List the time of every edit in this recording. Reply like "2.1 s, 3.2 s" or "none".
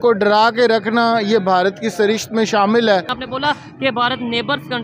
3.1 s